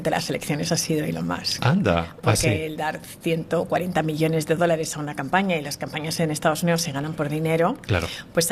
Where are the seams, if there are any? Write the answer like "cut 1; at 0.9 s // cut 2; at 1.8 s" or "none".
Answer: none